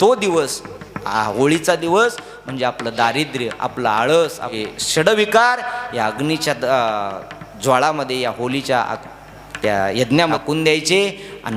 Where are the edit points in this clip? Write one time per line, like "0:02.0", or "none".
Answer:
0:04.5
0:10.4